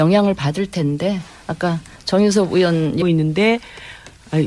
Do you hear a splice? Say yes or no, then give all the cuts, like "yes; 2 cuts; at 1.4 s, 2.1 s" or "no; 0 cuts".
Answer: no; 0 cuts